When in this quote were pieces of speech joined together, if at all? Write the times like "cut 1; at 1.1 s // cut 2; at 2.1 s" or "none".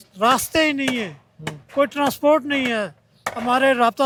none